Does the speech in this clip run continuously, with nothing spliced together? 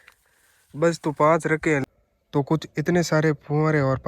no; 1 cut; at 1.8 s

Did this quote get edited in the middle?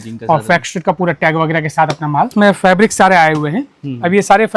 yes; 1 cut; at 2.3 s

